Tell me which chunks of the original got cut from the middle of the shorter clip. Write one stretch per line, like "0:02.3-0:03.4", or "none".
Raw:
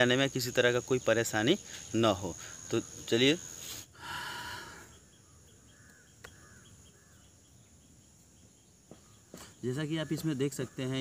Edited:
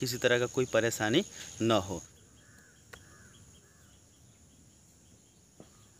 0:02.5-0:05.5